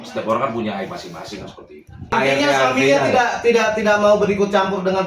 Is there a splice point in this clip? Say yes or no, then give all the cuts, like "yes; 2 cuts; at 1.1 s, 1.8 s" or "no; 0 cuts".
yes; 1 cut; at 2.1 s